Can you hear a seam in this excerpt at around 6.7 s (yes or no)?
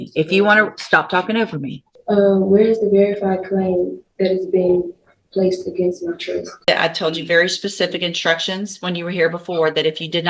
yes